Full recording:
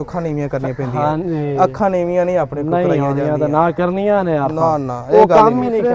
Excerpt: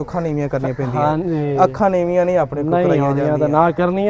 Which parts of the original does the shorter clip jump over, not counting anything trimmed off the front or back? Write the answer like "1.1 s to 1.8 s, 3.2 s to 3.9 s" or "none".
none